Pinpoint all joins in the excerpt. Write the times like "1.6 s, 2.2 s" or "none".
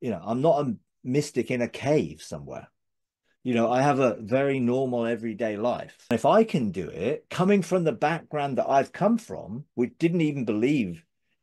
6.1 s